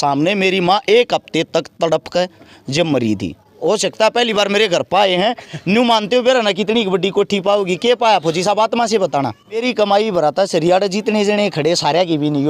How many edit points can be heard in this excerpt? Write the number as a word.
two